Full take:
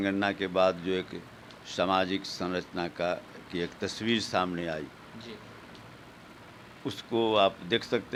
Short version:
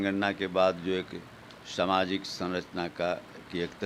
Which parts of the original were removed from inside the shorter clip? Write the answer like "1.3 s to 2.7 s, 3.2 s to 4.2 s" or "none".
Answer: none